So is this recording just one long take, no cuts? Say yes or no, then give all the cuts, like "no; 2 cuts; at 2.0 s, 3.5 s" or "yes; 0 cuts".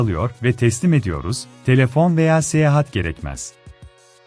yes; 0 cuts